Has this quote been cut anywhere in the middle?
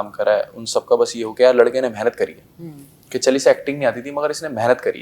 no; 0 cuts

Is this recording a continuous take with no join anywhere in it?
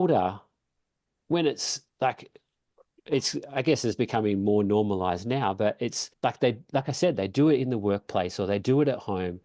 no; 1 cut; at 6.0 s

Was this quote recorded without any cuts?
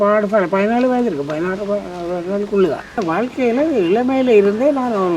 no; 1 cut; at 3.0 s

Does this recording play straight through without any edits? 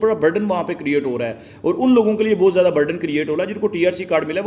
yes; 0 cuts

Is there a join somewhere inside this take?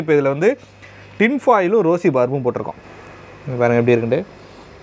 no; 0 cuts

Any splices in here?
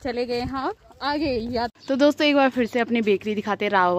yes; 1 cut; at 1.7 s

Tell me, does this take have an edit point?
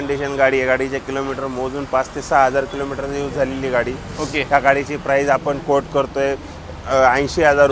no; 0 cuts

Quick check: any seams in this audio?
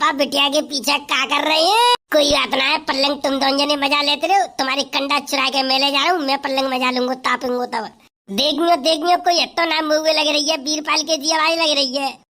yes; 1 cut; at 2.0 s

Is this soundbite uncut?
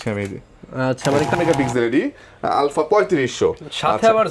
no; 1 cut; at 1.3 s

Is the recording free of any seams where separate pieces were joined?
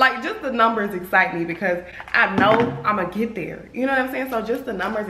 yes; 0 cuts

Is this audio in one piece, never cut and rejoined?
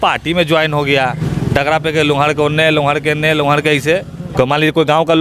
no; 2 cuts; at 1.3 s, 4.2 s

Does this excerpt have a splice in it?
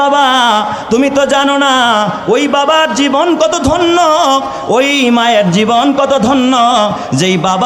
no; 0 cuts

